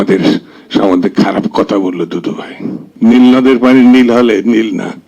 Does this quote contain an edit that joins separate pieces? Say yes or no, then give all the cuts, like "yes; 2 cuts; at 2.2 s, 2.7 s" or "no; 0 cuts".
yes; 1 cut; at 2.9 s